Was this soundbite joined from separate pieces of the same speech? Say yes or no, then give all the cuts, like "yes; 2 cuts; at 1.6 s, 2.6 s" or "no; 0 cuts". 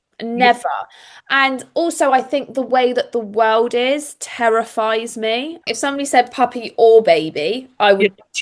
yes; 1 cut; at 5.7 s